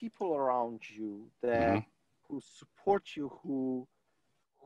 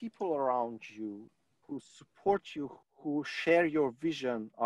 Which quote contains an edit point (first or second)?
second